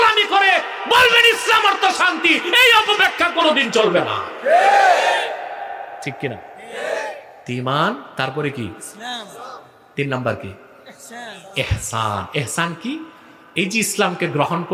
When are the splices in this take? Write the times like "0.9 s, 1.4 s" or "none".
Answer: none